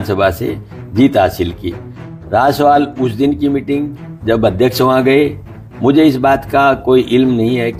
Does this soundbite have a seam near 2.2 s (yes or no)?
no